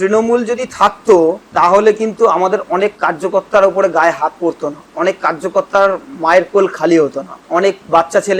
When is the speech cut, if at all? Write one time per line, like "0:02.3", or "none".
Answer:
0:01.4
0:04.8
0:07.3